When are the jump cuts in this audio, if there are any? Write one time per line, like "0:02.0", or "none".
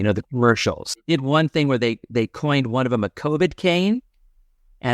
0:01.1